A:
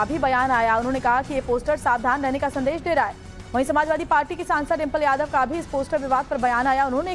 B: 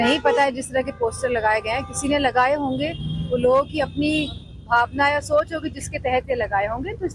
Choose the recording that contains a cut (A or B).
A